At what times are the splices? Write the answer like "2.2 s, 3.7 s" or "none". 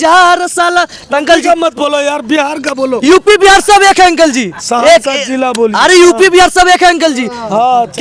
none